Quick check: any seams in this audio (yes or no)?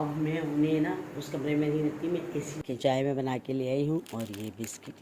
yes